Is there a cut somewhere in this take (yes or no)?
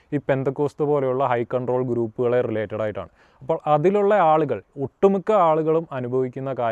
no